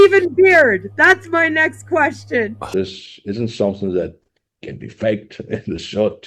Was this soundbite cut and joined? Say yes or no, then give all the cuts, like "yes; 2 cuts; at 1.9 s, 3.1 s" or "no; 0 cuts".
yes; 1 cut; at 2.7 s